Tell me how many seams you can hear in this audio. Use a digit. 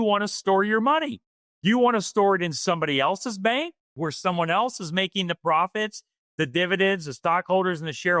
1